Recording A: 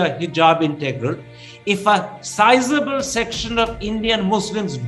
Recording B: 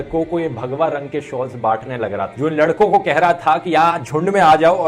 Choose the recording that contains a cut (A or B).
B